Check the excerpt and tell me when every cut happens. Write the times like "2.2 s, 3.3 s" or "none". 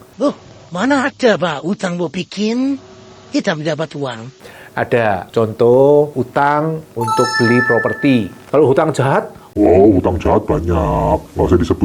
8.4 s